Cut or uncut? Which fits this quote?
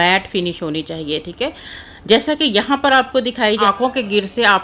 cut